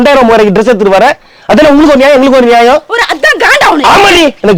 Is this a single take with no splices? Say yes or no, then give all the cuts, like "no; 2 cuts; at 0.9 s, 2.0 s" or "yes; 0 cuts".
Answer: yes; 0 cuts